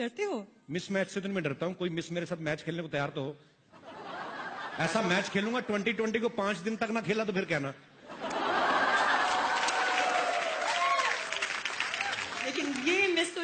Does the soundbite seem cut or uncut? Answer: uncut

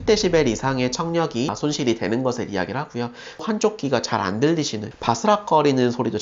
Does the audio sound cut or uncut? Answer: cut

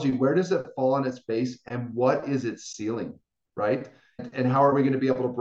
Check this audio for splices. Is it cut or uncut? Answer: uncut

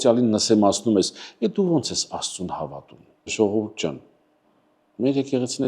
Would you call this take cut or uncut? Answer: cut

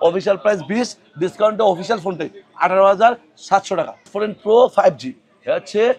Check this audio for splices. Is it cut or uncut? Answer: cut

